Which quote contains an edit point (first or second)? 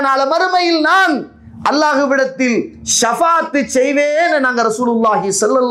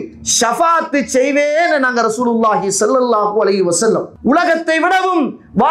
second